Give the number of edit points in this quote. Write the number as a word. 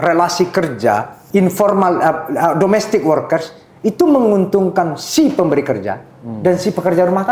one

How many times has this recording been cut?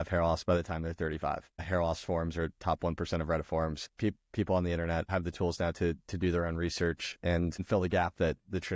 two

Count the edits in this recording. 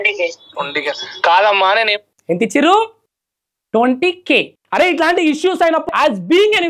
one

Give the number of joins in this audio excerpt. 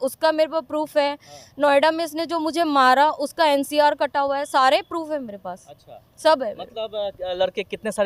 zero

